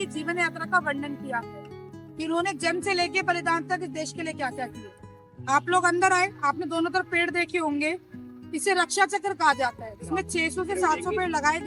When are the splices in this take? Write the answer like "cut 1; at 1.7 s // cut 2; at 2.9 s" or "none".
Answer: none